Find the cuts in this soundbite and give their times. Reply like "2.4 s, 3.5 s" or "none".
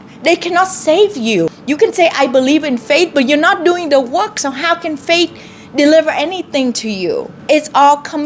1.6 s, 7.3 s